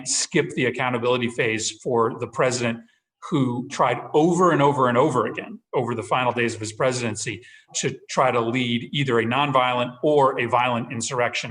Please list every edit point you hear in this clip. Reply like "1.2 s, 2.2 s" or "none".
3.7 s, 7.7 s